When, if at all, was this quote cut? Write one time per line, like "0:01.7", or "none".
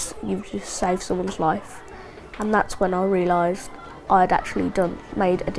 none